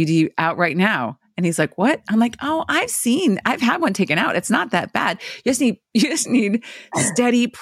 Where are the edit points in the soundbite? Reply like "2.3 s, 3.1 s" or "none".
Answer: none